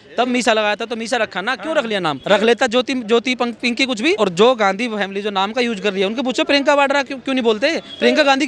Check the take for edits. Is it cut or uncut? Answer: cut